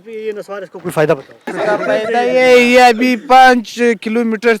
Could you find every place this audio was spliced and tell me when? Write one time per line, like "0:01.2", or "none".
0:01.5